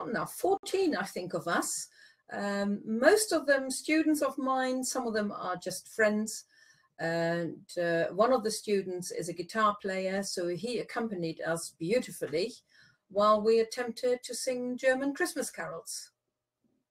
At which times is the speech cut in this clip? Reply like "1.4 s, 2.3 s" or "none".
6.3 s